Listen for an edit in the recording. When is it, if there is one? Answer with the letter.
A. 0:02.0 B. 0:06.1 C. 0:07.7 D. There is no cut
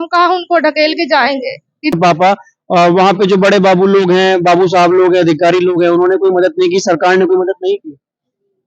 A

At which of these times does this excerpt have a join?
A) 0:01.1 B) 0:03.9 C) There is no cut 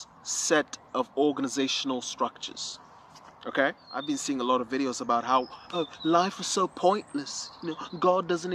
B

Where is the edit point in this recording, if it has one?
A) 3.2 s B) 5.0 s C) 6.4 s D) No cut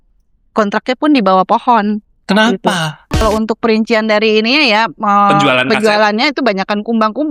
A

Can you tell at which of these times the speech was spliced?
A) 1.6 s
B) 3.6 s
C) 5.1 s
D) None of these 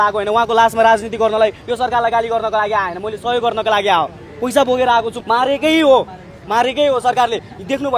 C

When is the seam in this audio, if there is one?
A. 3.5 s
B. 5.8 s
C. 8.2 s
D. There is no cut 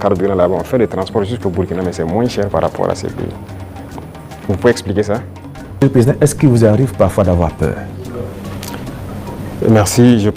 B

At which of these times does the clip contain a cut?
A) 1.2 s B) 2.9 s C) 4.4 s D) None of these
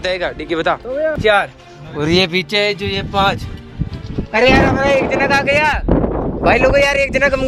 A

